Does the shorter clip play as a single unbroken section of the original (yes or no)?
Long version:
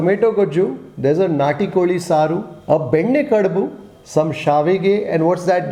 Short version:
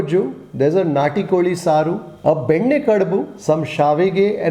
no